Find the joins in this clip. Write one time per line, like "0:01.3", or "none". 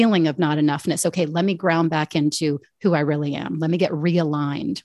none

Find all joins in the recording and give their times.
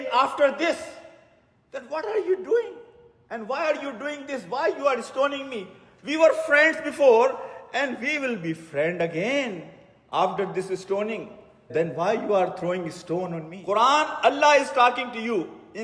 0:11.7
0:13.5

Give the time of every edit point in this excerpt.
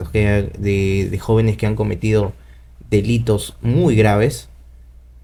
none

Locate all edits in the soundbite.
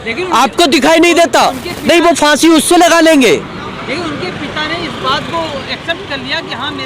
none

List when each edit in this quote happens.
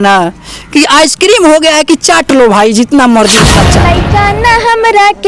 0:03.9

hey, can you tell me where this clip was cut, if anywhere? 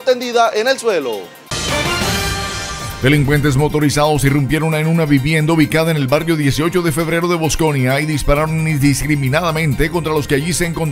0:01.3
0:02.8

